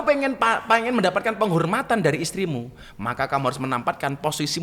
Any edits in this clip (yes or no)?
no